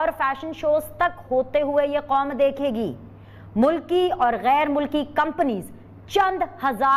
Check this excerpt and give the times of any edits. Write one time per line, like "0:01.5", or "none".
none